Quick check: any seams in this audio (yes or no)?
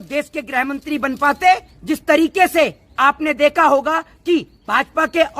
yes